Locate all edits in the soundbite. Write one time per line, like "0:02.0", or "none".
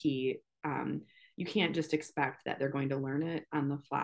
none